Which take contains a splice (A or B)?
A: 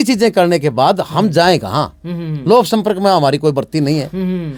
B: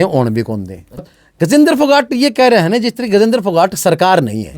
B